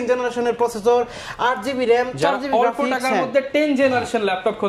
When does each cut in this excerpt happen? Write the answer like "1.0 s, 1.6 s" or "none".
none